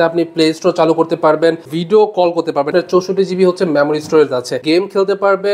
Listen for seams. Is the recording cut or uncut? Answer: cut